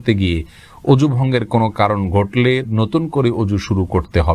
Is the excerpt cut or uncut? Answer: uncut